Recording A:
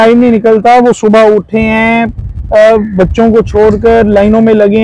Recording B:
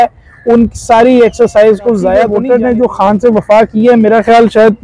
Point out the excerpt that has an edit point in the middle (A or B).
B